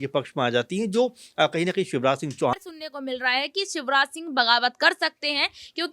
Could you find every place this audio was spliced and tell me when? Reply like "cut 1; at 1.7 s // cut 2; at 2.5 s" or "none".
cut 1; at 2.5 s

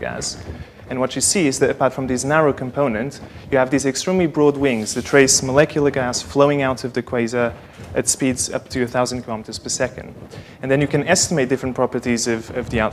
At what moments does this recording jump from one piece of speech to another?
none

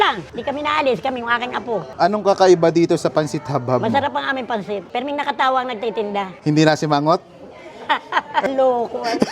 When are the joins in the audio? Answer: cut 1; at 1.9 s // cut 2; at 8.4 s

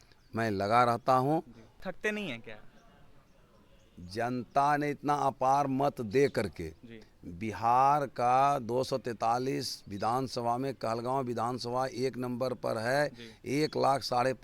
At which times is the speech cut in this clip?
cut 1; at 1.8 s

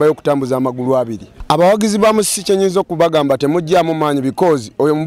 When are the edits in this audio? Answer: cut 1; at 1.3 s

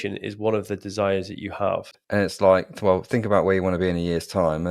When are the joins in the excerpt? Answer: cut 1; at 1.9 s

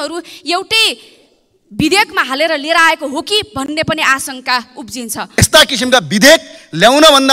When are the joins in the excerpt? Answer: cut 1; at 5.4 s

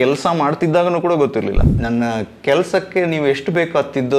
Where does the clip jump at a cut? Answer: cut 1; at 1.7 s

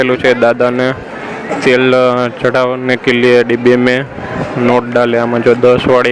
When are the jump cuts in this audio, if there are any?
none

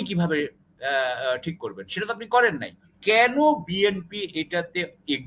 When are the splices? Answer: cut 1; at 2.9 s

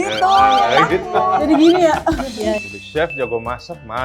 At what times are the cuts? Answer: cut 1; at 2.6 s

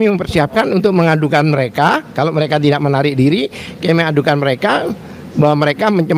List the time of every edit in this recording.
none

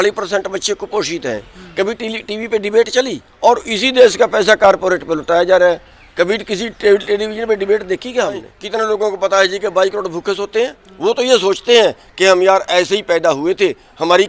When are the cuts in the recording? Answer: cut 1; at 3.2 s // cut 2; at 8.5 s // cut 3; at 10.8 s

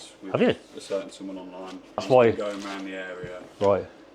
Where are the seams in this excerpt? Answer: cut 1; at 2.0 s

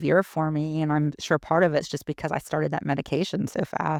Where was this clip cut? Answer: none

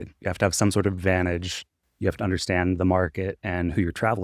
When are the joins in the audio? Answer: none

